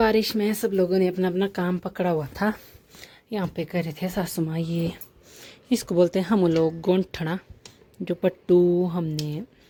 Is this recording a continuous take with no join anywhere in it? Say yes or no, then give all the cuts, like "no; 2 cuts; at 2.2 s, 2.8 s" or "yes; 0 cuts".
yes; 0 cuts